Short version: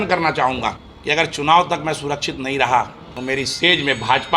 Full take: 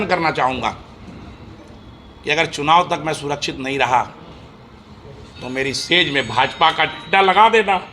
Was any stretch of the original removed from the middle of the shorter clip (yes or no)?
yes